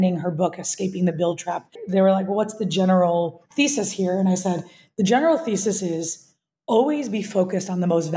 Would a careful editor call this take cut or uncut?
cut